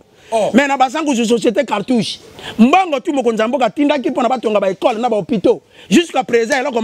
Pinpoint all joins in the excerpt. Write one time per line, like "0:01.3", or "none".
none